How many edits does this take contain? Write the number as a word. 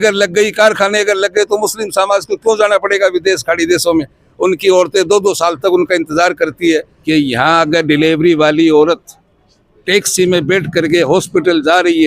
one